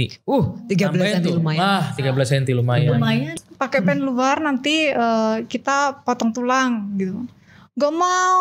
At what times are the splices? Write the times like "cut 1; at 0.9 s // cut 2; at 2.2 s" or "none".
cut 1; at 3.3 s